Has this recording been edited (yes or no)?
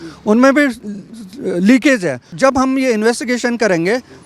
yes